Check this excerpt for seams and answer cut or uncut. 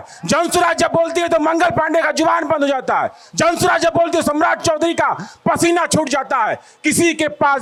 uncut